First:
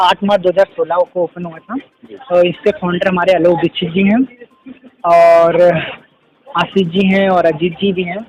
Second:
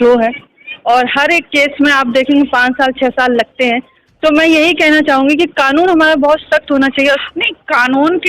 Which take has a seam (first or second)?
second